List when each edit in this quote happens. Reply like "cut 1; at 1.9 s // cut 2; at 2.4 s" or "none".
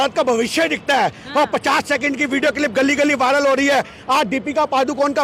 none